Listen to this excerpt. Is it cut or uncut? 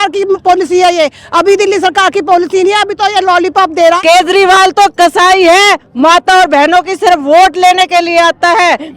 cut